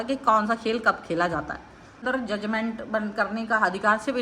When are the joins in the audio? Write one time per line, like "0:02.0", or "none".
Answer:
0:02.0